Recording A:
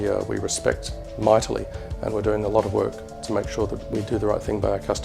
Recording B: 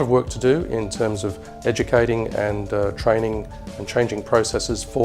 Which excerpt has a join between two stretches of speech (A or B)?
A